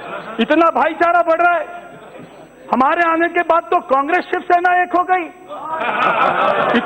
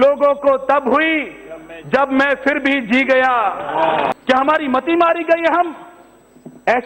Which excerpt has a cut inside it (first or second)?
second